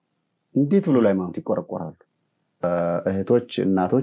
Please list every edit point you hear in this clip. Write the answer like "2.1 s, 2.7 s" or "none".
2.6 s